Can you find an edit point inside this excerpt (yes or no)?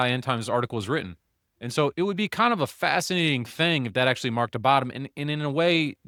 no